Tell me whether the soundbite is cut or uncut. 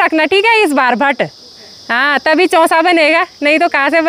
uncut